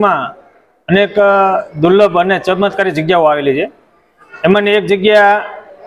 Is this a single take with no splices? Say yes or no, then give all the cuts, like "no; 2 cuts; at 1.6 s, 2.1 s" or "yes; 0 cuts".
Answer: yes; 0 cuts